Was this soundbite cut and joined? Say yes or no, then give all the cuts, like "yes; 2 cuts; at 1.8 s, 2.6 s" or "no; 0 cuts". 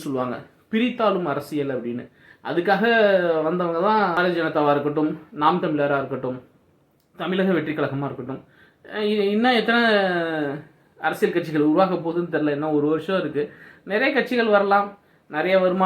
yes; 1 cut; at 4.1 s